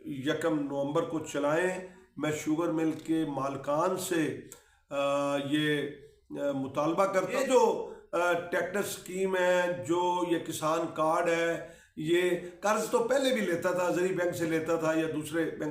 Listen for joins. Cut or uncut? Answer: cut